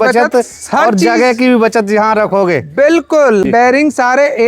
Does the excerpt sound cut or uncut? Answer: cut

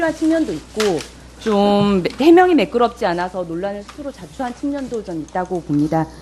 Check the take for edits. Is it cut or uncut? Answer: cut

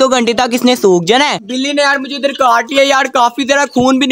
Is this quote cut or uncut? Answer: cut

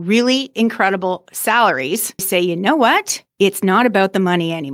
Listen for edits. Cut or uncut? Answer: cut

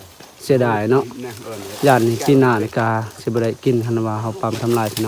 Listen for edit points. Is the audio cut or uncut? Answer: uncut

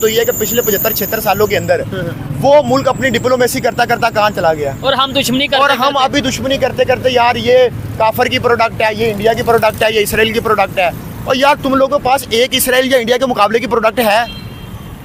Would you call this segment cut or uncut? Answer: uncut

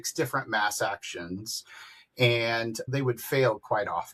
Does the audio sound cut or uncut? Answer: uncut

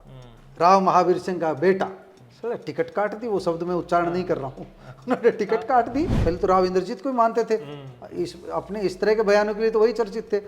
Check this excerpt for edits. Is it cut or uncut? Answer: cut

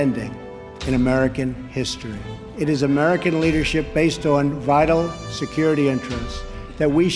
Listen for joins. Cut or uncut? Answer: cut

